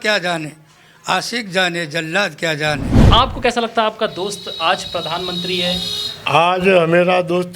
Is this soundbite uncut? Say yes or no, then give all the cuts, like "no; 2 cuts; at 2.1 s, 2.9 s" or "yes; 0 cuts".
no; 1 cut; at 3.1 s